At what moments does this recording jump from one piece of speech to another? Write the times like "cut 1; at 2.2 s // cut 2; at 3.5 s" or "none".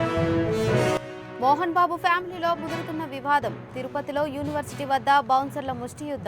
cut 1; at 1.1 s